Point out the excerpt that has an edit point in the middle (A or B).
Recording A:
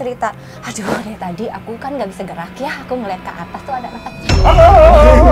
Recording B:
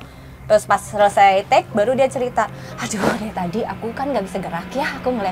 A